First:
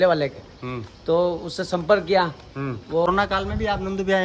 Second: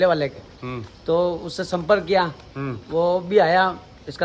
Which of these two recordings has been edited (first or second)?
first